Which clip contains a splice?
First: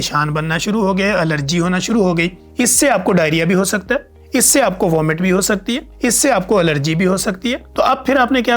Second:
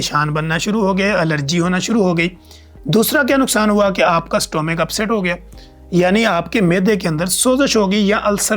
first; 4 cuts; at 2.4 s, 4.1 s, 5.9 s, 7.6 s

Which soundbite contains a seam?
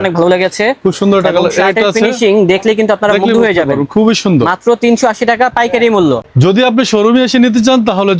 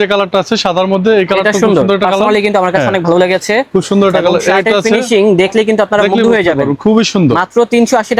first; 1 cut; at 6.2 s

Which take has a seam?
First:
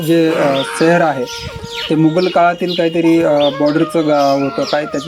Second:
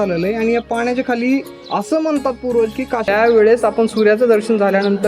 second; 1 cut; at 3.1 s

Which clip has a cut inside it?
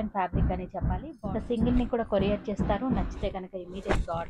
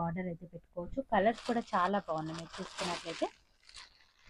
first; 1 cut; at 1.1 s

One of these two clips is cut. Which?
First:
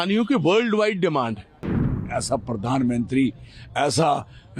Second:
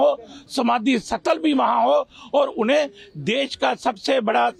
first; 1 cut; at 2.0 s

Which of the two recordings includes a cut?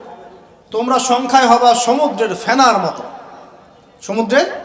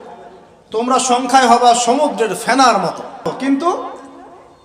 second; 1 cut; at 3.3 s

